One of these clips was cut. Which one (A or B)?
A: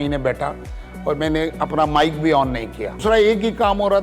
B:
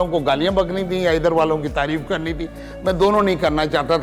A